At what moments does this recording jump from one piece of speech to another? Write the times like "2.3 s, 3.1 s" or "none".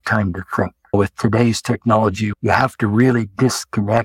0.9 s, 2.3 s